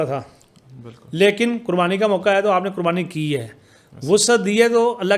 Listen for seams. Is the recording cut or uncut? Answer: uncut